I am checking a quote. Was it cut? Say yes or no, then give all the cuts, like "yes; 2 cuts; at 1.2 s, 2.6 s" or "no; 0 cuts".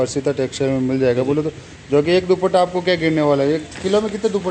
no; 0 cuts